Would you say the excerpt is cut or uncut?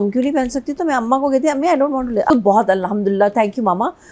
cut